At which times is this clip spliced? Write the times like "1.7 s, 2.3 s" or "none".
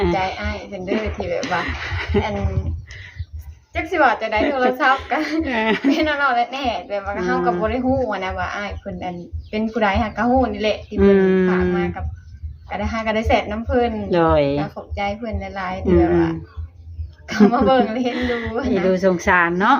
none